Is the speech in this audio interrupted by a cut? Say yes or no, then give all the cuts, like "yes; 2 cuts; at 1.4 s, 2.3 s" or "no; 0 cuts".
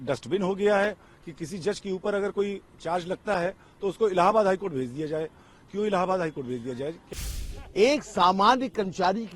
yes; 1 cut; at 7.0 s